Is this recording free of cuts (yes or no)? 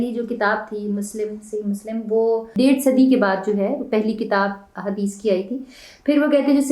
no